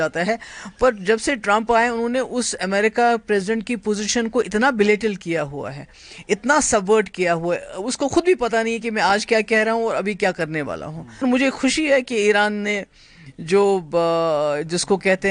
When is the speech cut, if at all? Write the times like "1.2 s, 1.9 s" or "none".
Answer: 11.2 s